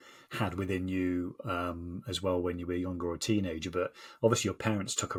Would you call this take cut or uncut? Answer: uncut